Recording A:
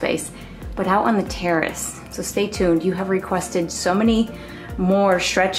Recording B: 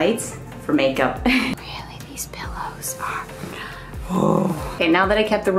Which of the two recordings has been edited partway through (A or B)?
B